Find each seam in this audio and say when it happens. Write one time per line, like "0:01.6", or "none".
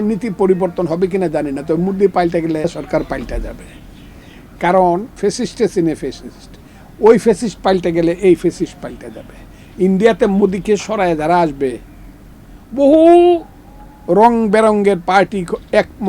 0:02.6
0:05.1